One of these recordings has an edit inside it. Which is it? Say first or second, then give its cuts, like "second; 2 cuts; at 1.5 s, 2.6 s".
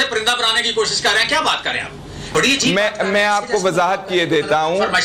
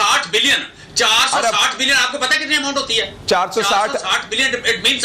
first; 1 cut; at 2.3 s